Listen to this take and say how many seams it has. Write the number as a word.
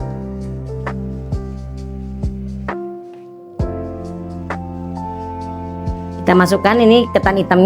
one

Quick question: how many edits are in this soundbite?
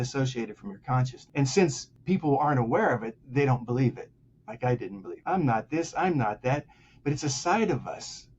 three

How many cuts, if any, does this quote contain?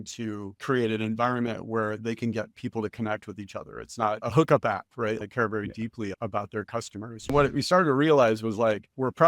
four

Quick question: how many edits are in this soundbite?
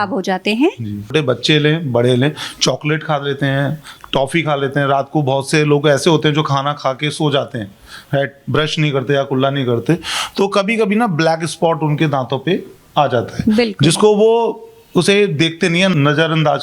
one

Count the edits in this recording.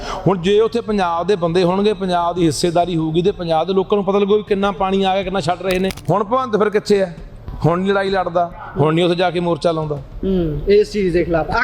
one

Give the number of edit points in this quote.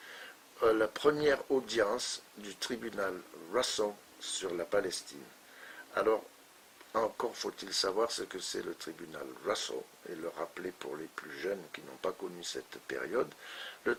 zero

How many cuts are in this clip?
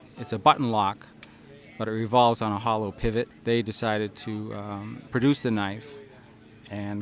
two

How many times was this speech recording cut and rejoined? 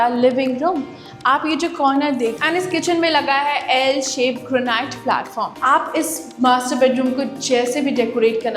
two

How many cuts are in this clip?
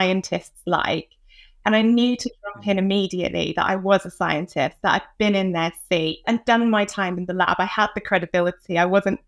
one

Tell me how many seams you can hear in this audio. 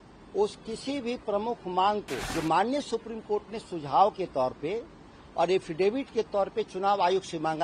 one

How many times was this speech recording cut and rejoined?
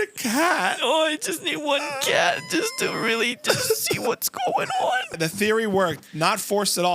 one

